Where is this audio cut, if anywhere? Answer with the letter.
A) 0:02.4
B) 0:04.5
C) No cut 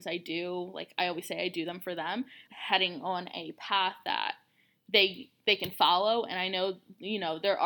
A